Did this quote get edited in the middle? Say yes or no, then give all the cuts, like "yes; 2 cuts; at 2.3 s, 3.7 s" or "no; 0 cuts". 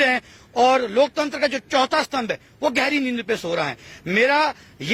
no; 0 cuts